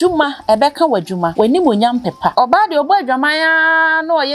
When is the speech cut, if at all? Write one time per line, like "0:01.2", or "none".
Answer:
0:01.3
0:02.3